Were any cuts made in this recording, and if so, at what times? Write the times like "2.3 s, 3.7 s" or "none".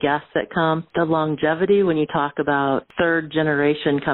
0.9 s, 2.9 s